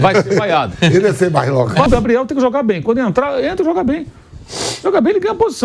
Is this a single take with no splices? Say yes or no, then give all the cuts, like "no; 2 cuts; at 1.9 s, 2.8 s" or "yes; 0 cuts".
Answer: no; 1 cut; at 1.9 s